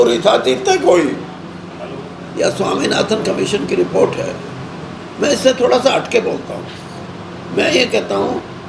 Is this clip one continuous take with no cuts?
no; 1 cut; at 2.7 s

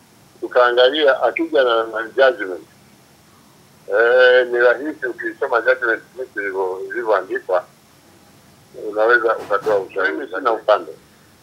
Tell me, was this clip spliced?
yes; 1 cut; at 10.2 s

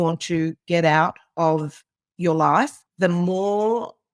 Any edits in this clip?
yes; 1 cut; at 2.8 s

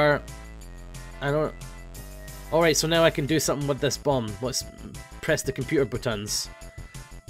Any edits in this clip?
no; 0 cuts

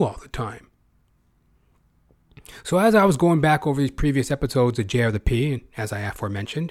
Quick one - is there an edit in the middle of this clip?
no; 0 cuts

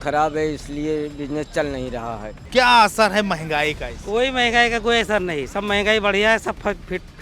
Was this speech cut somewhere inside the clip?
yes; 1 cut; at 2.4 s

